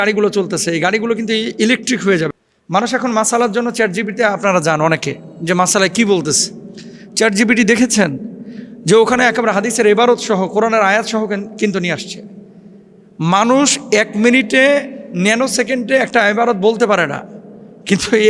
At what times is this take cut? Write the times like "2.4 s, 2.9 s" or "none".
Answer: 2.3 s